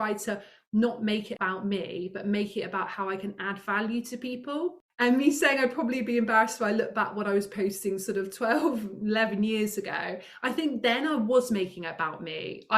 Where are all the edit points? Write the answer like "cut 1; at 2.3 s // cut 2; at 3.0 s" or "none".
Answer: cut 1; at 1.3 s // cut 2; at 4.8 s